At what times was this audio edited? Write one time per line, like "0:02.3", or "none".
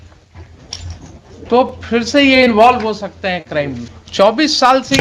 0:03.9